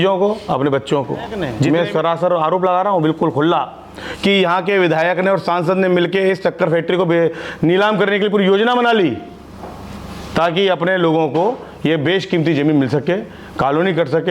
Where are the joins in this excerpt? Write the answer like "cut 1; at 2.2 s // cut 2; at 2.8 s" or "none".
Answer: cut 1; at 1.5 s